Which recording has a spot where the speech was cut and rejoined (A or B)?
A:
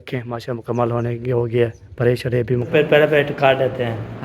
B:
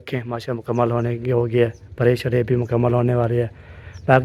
A